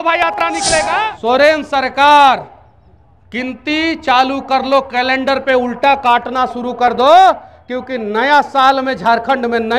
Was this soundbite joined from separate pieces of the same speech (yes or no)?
yes